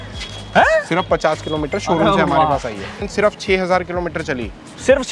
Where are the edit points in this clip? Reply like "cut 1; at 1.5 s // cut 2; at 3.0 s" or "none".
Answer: cut 1; at 2.9 s

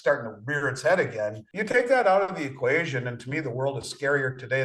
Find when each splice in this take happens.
cut 1; at 1.5 s

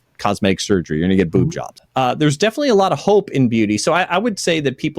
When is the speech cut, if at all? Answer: cut 1; at 1.7 s

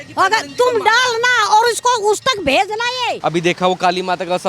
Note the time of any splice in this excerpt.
cut 1; at 3.2 s

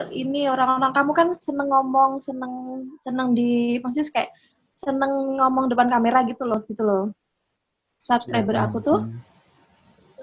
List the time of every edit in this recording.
cut 1; at 6.5 s

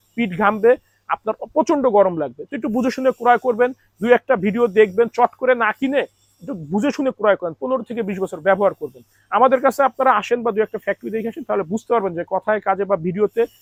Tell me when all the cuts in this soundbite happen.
none

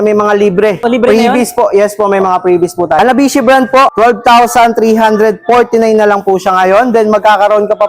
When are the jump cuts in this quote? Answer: cut 1; at 0.8 s // cut 2; at 3.0 s // cut 3; at 3.9 s

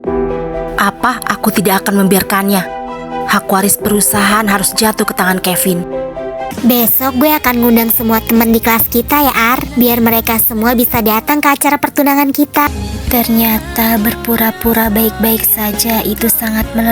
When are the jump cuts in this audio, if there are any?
cut 1; at 6.5 s // cut 2; at 12.7 s

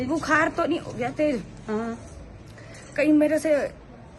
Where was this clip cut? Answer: none

